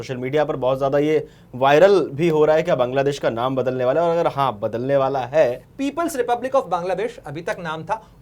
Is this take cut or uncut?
cut